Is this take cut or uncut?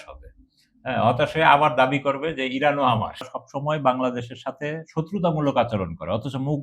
cut